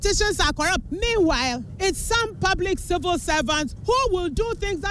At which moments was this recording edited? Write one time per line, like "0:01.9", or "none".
0:00.8
0:01.7
0:03.7